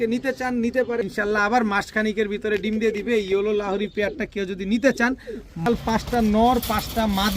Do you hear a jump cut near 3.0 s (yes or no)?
no